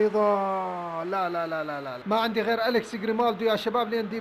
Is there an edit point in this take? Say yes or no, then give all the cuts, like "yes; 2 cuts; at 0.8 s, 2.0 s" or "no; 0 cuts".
yes; 1 cut; at 1.9 s